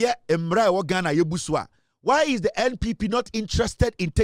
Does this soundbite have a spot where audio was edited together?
no; 0 cuts

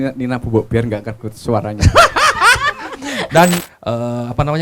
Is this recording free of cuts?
no; 1 cut; at 3.7 s

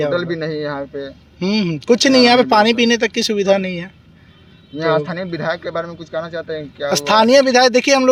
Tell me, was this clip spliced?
no; 0 cuts

